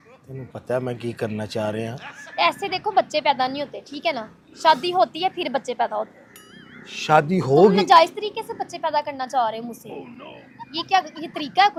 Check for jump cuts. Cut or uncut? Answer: uncut